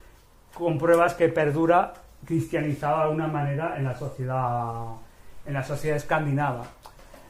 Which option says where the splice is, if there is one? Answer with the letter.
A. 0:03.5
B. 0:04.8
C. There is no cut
B